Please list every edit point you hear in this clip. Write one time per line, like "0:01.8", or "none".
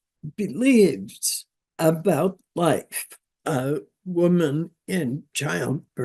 0:03.2